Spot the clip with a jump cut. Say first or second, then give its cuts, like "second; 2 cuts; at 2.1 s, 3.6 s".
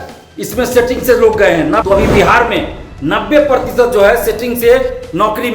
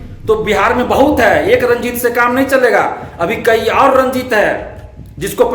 first; 1 cut; at 1.8 s